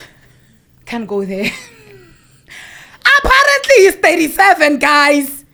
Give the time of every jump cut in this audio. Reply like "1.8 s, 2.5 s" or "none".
none